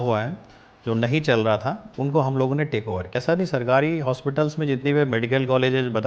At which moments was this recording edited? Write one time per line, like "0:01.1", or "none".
0:03.2